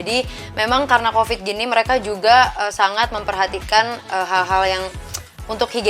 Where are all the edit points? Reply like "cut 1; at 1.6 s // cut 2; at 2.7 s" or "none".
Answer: none